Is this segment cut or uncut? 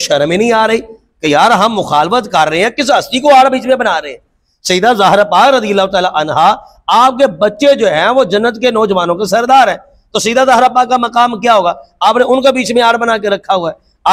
uncut